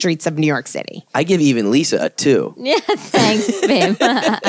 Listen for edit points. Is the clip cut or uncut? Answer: uncut